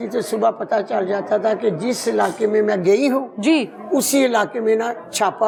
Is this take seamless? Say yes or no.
yes